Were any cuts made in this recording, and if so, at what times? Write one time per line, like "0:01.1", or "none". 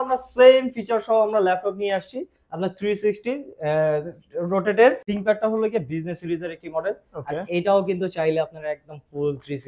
0:05.1